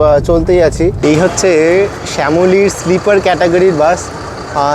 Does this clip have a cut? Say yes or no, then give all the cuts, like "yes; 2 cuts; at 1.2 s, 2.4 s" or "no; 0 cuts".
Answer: yes; 1 cut; at 1.0 s